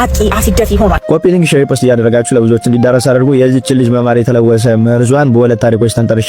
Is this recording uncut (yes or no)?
yes